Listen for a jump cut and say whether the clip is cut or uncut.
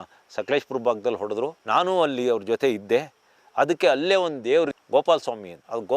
cut